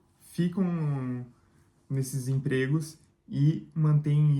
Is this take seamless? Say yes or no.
yes